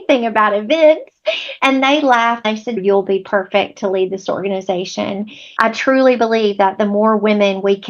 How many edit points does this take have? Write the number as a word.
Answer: two